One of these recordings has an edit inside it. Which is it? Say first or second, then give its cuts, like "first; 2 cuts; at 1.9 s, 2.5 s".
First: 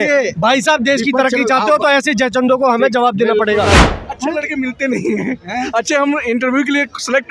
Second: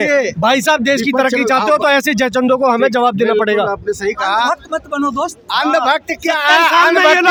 first; 1 cut; at 3.8 s